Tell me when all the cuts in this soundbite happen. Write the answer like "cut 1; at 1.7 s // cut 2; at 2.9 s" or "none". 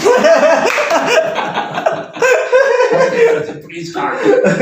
none